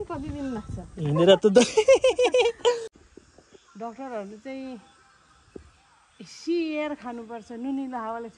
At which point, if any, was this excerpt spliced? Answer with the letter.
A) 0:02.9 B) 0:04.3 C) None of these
A